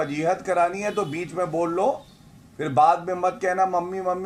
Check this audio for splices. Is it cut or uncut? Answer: uncut